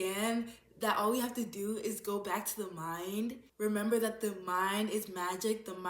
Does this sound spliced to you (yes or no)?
yes